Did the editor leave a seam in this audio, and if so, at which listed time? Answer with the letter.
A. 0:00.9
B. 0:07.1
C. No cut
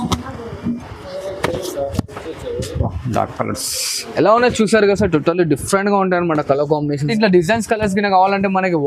B